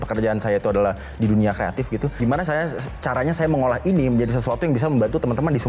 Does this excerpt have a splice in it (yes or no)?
yes